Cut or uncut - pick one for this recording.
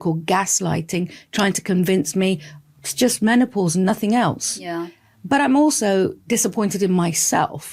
uncut